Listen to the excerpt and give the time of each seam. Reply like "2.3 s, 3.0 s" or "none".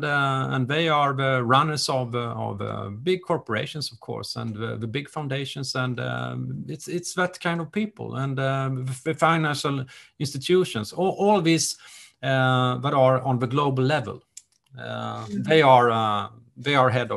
none